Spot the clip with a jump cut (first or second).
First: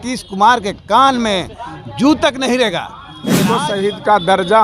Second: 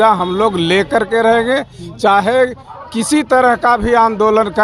first